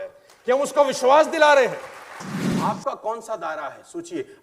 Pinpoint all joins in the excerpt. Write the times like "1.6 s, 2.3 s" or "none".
2.5 s